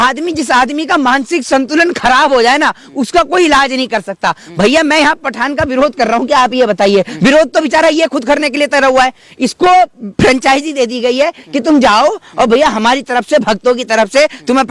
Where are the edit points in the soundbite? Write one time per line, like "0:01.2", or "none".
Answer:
none